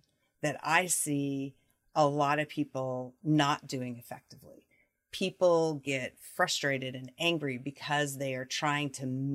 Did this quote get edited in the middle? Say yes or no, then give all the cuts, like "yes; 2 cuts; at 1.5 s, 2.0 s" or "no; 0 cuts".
no; 0 cuts